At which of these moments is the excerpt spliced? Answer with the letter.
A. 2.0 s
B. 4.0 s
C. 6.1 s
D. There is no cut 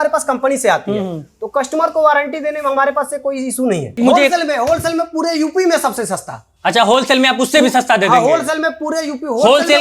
B